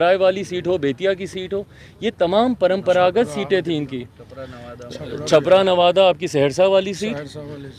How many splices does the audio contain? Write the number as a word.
zero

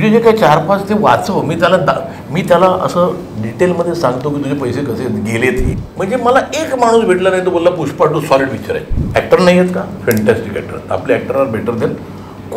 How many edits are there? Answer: two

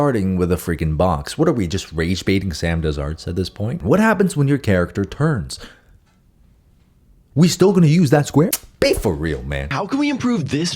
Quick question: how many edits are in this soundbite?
two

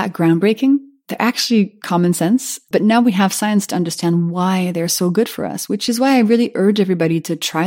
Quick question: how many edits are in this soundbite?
zero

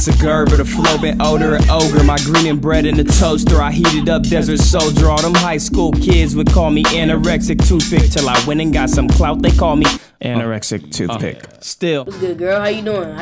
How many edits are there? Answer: one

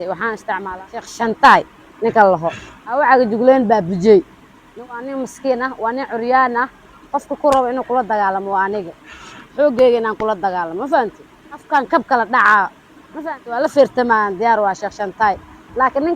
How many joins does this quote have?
two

